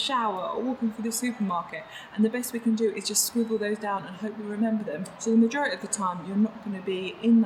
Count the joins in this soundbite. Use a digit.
1